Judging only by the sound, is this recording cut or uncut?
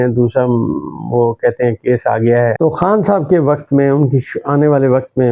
cut